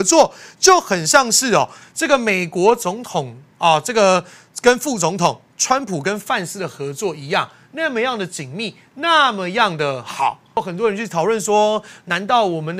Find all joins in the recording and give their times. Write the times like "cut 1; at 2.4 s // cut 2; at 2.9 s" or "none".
cut 1; at 10.6 s